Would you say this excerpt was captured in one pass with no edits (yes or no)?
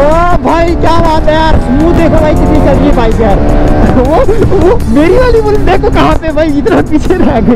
yes